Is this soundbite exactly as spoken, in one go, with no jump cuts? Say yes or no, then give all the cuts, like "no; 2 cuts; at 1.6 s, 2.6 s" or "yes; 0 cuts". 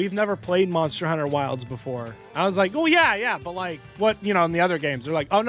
yes; 0 cuts